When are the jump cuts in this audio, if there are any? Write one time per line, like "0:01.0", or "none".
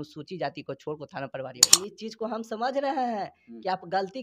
0:01.9